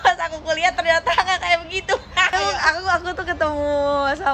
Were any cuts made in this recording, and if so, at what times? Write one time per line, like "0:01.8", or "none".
0:02.3